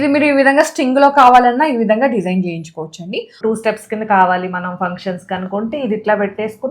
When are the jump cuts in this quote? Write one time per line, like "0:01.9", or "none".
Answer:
0:03.3